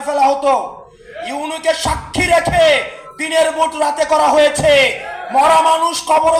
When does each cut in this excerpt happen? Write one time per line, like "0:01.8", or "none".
none